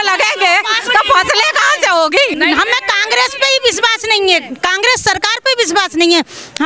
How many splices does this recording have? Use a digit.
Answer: 1